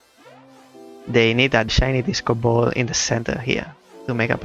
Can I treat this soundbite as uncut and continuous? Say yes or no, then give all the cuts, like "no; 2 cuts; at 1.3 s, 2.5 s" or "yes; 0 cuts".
no; 1 cut; at 1.7 s